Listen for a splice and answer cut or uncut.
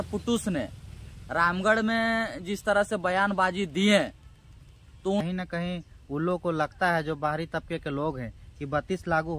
cut